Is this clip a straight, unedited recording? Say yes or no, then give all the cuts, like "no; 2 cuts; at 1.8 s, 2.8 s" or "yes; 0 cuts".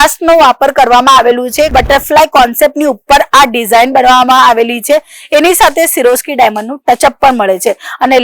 no; 1 cut; at 1.7 s